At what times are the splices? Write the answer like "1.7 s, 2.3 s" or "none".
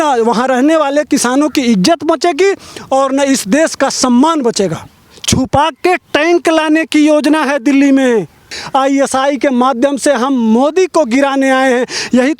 4.9 s, 8.6 s

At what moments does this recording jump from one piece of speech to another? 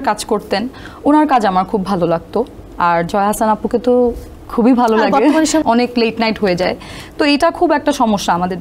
5.6 s

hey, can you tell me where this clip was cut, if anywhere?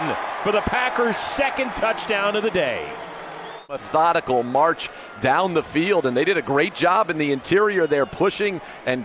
none

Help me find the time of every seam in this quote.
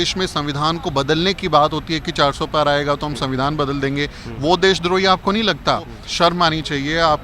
6.0 s

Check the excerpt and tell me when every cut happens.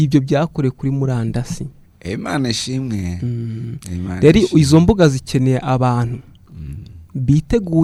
none

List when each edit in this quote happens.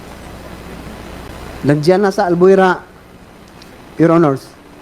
1.3 s

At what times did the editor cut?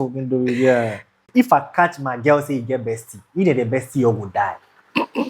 1.2 s

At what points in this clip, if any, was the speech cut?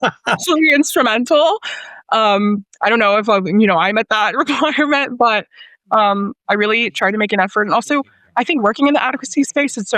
none

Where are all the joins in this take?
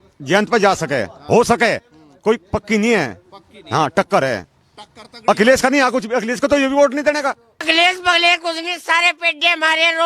7.6 s

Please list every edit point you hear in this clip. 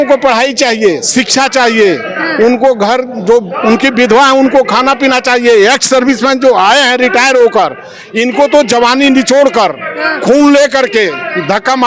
none

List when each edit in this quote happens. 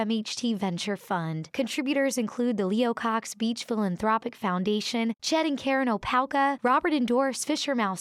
none

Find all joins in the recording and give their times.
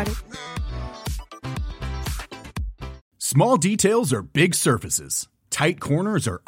3.1 s

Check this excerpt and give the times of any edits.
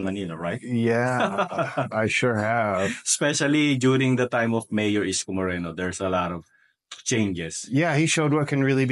none

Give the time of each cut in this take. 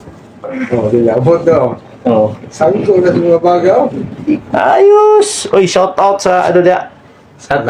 4.5 s

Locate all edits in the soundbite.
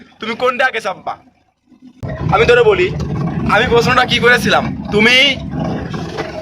1.8 s

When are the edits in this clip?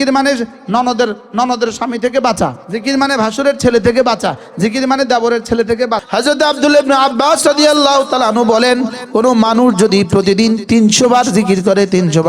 2.7 s, 6.0 s

